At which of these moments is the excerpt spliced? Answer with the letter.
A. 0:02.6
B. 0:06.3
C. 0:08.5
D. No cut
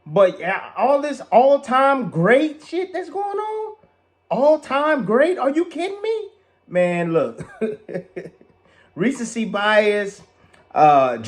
B